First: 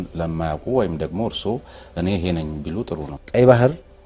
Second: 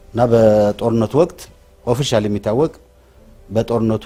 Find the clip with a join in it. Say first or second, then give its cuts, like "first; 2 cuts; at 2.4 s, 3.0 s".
first; 1 cut; at 3.1 s